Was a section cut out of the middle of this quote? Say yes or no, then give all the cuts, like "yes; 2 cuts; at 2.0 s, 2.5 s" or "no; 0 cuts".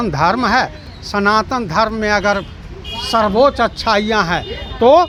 no; 0 cuts